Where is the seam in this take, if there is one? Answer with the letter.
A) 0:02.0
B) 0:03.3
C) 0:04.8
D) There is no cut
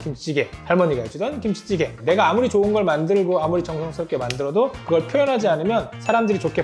A